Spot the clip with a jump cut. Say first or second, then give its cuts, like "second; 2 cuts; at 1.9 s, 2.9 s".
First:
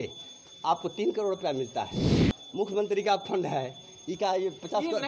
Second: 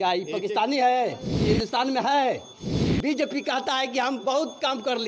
second; 1 cut; at 1.3 s